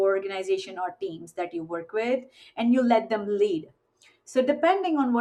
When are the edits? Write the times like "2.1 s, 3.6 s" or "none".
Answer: none